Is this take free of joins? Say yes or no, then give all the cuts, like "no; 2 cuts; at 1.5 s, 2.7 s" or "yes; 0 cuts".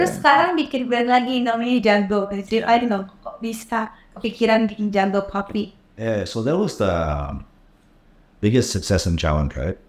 yes; 0 cuts